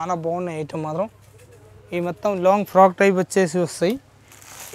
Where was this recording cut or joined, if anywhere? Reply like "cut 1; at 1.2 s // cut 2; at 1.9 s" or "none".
none